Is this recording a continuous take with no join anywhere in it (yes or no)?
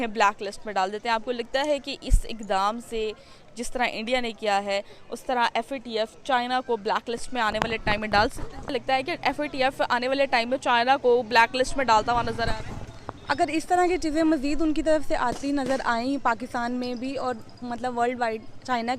no